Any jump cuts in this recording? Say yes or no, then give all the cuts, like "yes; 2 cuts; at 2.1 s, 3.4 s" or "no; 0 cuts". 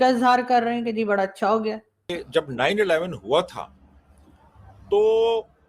yes; 1 cut; at 2.2 s